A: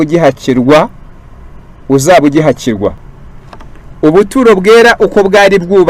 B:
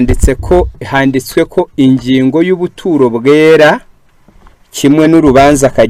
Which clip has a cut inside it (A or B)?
A